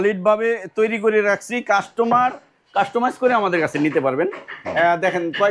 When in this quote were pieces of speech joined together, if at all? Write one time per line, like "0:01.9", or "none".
none